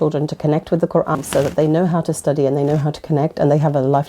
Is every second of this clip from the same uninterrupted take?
no; 1 cut; at 1.2 s

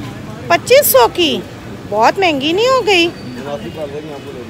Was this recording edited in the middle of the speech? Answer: no; 0 cuts

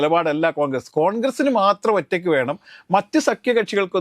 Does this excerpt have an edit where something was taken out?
no; 0 cuts

